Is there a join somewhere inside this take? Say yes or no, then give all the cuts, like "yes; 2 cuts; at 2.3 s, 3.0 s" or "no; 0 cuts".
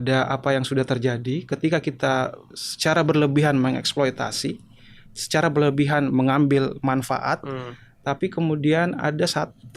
no; 0 cuts